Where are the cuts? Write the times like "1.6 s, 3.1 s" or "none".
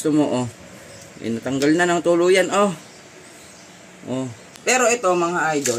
4.4 s